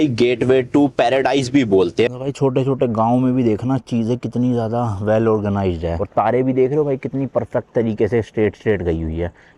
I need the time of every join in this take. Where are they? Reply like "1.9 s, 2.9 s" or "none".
2.1 s, 6.0 s